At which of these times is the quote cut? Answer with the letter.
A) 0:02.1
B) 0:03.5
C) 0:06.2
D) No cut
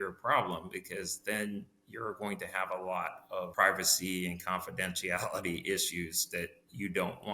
B